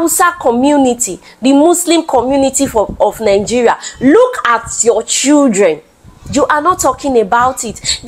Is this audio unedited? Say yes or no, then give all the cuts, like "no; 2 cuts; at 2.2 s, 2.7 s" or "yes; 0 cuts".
yes; 0 cuts